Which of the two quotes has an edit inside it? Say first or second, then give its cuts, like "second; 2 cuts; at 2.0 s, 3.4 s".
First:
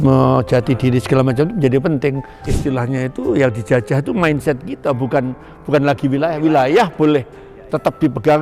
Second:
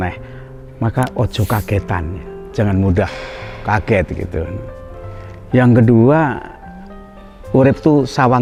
first; 1 cut; at 2.4 s